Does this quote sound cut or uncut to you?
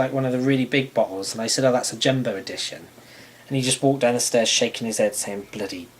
uncut